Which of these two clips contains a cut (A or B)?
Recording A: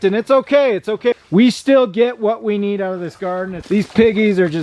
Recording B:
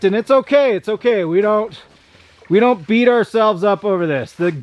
A